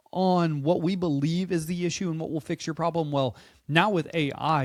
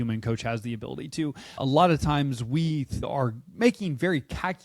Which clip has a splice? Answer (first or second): second